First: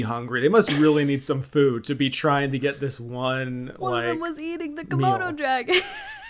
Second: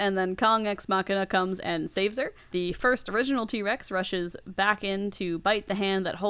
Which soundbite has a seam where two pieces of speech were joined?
second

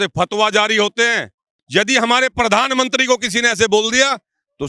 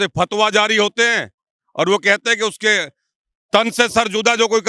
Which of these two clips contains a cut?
first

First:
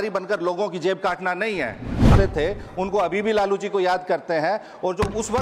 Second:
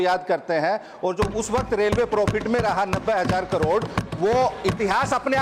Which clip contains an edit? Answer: first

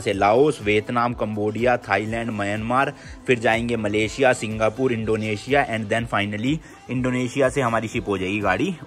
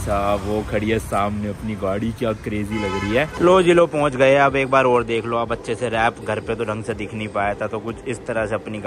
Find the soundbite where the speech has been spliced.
second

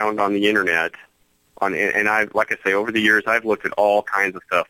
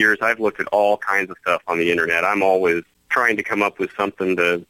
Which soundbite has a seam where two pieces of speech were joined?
second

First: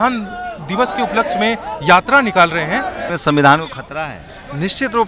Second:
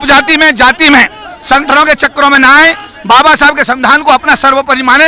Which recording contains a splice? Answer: first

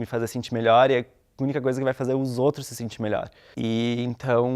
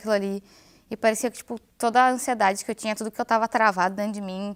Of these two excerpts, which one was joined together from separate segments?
first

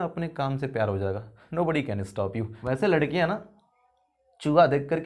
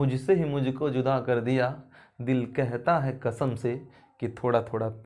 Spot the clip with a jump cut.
first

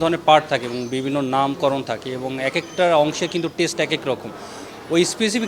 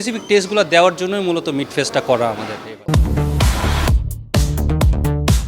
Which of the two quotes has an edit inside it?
second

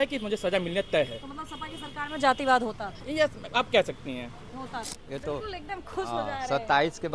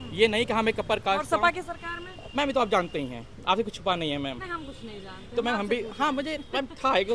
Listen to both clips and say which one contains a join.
first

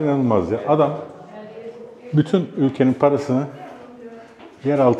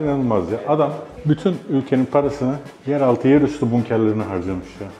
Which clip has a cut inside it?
second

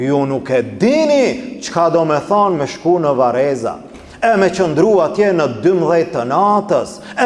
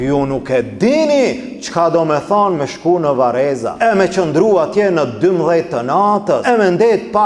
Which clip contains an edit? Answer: second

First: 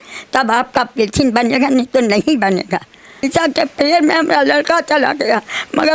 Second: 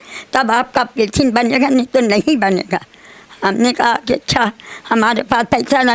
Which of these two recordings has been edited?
first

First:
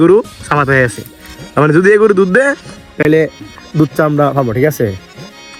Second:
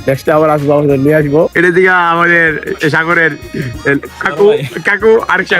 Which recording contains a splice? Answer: second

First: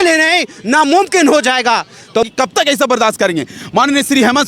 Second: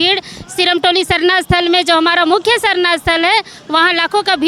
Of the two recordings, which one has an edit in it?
first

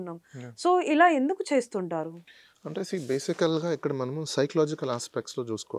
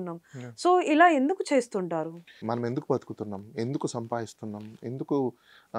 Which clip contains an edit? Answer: second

